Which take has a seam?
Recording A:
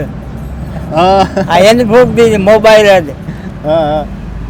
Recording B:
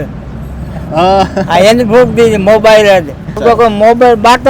B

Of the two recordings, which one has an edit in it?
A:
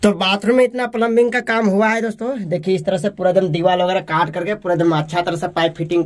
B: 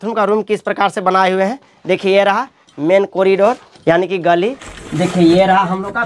B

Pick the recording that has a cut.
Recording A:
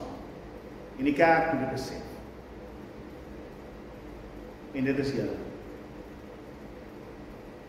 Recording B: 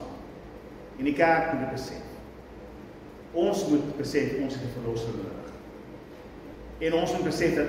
B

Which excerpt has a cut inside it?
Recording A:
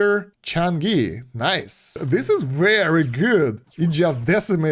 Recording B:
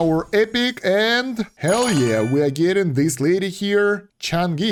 A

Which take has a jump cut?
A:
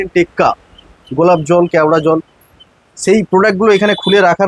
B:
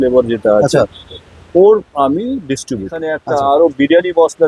B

